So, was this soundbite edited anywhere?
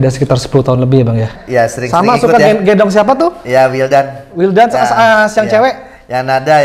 yes; 1 cut; at 1.3 s

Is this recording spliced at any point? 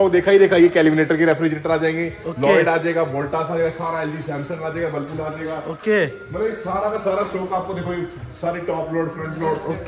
no; 0 cuts

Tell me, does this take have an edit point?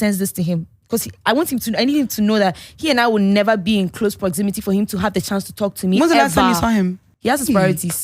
yes; 1 cut; at 7.1 s

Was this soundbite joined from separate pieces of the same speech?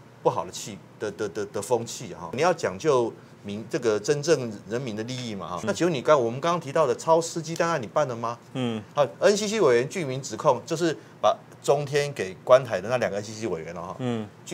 yes; 2 cuts; at 2.4 s, 5.6 s

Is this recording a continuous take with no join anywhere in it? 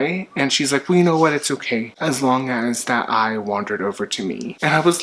no; 1 cut; at 1.9 s

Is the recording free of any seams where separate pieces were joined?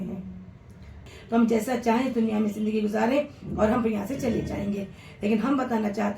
no; 1 cut; at 1.1 s

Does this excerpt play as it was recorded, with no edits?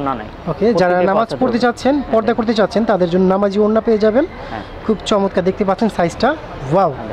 yes; 0 cuts

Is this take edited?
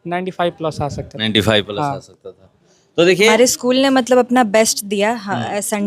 yes; 1 cut; at 3.3 s

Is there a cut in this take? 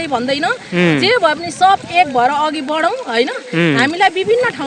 no; 0 cuts

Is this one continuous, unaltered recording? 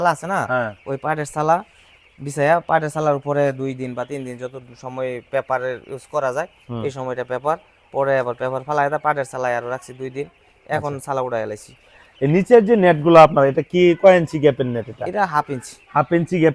yes; 0 cuts

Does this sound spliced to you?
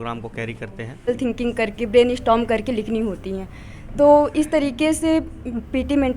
yes; 1 cut; at 1.1 s

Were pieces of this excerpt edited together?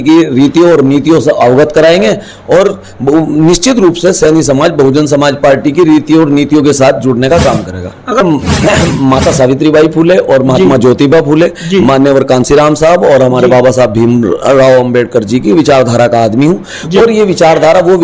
yes; 1 cut; at 8.2 s

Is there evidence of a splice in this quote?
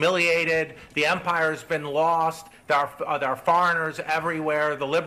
no; 0 cuts

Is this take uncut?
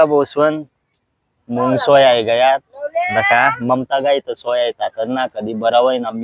yes; 0 cuts

